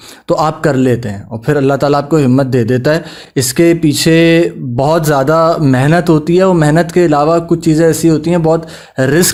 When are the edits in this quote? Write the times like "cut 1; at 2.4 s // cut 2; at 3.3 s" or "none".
none